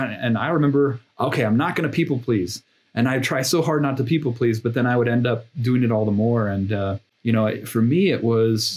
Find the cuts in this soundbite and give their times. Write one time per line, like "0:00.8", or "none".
0:07.1